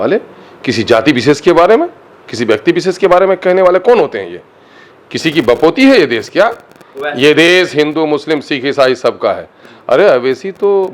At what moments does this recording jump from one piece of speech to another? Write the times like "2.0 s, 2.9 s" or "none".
none